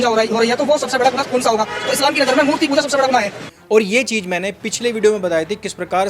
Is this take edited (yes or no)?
yes